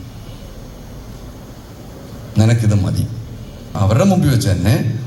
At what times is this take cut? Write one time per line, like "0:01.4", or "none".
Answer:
0:03.7